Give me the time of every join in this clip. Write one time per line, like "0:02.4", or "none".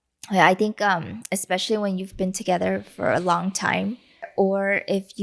0:04.3